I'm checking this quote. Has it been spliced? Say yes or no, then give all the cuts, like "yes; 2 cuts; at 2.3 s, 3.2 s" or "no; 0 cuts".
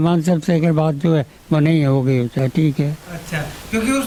no; 0 cuts